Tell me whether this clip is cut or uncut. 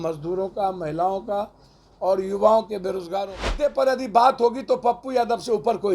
cut